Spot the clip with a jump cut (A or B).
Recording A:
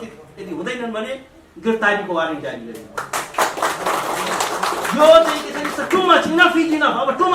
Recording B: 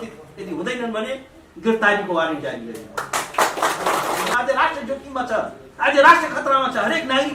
B